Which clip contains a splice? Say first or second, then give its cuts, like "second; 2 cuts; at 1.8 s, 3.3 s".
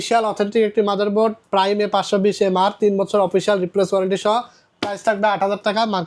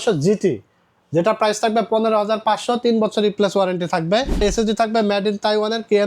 second; 1 cut; at 4.4 s